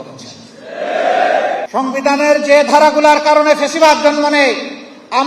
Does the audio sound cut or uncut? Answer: cut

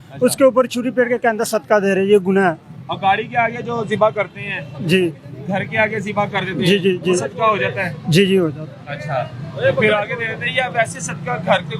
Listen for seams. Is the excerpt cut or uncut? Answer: uncut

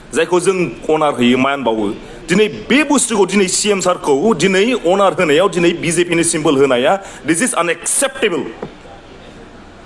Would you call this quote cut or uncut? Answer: uncut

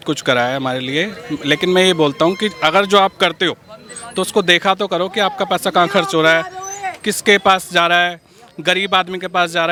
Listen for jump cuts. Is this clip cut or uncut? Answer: uncut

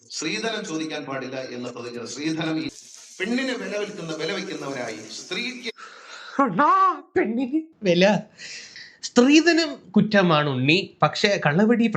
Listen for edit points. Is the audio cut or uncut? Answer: cut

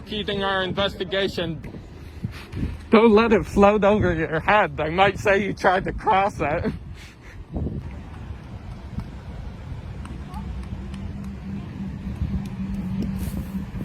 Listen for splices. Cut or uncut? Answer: cut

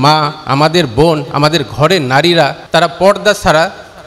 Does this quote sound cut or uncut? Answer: cut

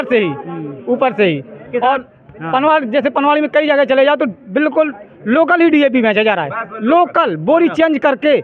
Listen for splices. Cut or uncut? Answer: uncut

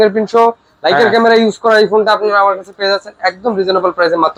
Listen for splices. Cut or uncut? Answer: uncut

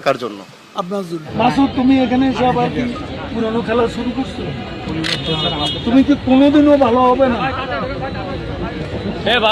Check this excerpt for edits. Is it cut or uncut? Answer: cut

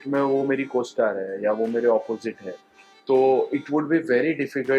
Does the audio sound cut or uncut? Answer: uncut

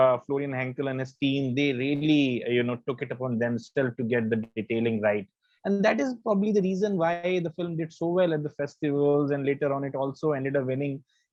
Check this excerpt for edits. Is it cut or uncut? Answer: uncut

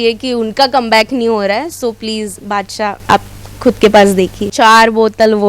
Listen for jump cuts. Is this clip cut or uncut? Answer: cut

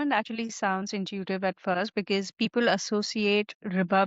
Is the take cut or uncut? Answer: uncut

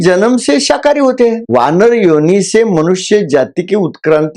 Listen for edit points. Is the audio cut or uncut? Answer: uncut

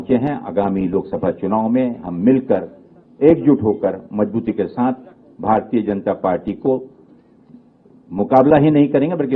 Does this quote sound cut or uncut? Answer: uncut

